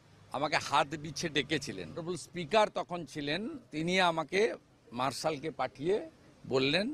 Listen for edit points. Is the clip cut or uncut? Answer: cut